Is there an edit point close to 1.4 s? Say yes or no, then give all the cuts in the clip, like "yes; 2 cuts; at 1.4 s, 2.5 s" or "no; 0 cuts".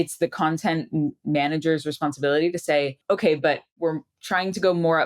no; 2 cuts; at 3.0 s, 3.7 s